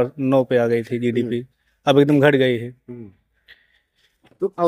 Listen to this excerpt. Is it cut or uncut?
uncut